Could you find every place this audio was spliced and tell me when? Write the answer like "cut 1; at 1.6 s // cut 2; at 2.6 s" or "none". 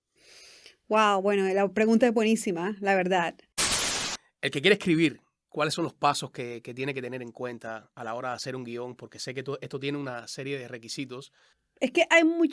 cut 1; at 3.7 s